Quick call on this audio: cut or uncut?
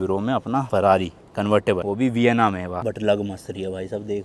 cut